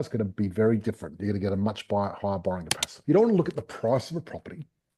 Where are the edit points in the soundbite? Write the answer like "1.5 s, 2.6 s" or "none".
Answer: 2.9 s